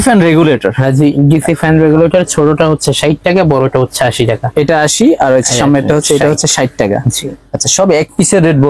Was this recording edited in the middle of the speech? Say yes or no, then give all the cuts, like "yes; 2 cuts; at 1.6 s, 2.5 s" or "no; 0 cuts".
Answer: no; 0 cuts